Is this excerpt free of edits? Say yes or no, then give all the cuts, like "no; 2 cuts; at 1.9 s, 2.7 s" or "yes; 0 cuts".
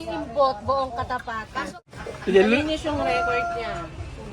no; 1 cut; at 1.8 s